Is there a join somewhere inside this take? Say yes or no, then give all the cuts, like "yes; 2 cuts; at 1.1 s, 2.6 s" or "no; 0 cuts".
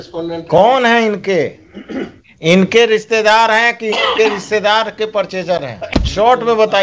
yes; 1 cut; at 5.8 s